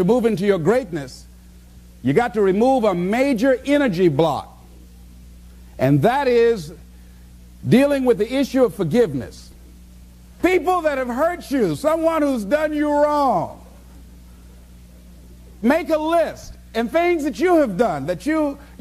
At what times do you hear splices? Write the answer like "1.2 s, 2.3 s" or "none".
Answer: none